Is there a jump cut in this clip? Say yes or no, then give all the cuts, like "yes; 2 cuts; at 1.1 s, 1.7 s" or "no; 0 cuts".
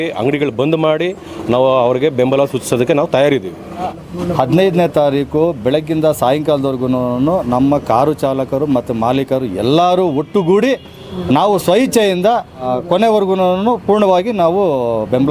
yes; 2 cuts; at 3.9 s, 12.7 s